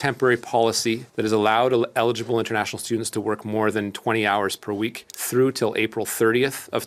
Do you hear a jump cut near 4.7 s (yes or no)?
no